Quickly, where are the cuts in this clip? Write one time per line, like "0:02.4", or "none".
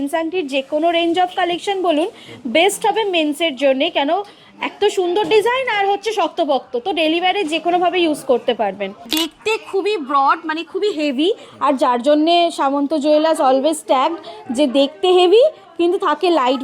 0:09.1